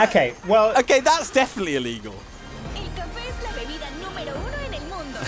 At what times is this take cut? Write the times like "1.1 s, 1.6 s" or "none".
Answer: 2.4 s